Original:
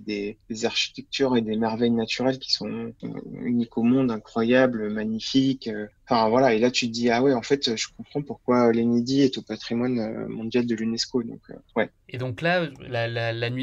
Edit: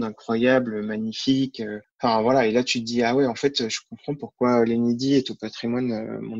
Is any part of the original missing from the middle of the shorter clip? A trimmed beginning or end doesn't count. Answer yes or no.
no